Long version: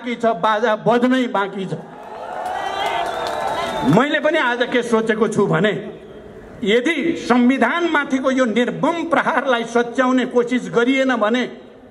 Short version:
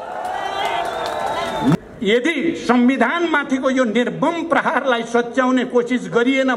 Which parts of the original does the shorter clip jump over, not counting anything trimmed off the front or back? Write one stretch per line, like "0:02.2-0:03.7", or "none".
0:04.0-0:06.4